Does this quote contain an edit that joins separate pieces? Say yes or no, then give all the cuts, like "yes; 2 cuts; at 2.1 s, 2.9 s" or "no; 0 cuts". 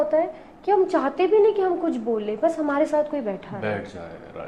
no; 0 cuts